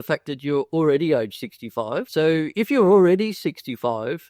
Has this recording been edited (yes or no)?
yes